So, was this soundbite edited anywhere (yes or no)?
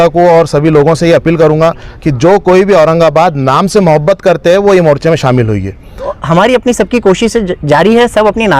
yes